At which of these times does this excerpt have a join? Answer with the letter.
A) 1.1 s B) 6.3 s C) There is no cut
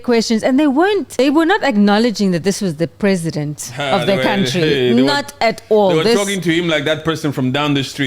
A